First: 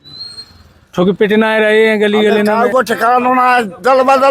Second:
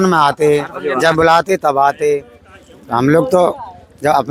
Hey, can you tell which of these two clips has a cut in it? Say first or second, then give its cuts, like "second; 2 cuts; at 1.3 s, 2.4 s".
first; 1 cut; at 2.5 s